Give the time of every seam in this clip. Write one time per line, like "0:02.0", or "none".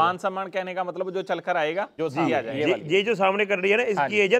0:02.5